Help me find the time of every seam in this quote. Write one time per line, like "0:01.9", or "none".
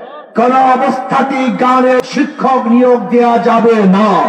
0:02.0

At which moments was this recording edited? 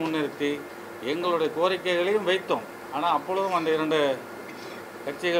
none

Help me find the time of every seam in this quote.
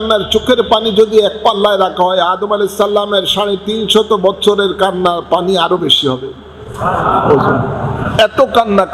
none

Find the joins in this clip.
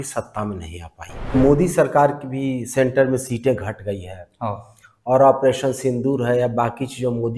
0:01.3

